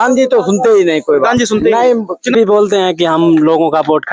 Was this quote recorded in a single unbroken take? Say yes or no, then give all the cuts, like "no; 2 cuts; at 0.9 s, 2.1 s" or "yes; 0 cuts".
no; 1 cut; at 2.3 s